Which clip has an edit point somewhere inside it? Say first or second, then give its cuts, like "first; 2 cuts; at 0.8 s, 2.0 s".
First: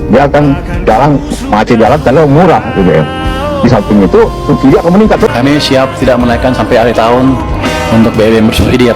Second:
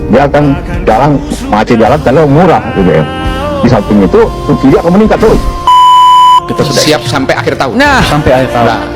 first; 1 cut; at 5.3 s